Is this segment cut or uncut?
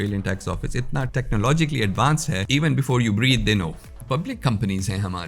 cut